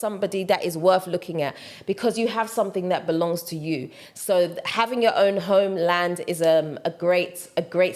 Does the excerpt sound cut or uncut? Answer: uncut